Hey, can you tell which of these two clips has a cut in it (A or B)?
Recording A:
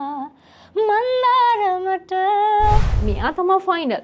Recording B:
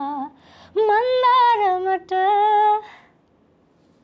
A